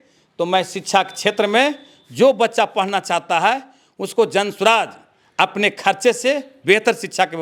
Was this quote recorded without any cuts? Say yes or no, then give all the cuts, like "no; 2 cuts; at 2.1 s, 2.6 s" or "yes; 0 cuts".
yes; 0 cuts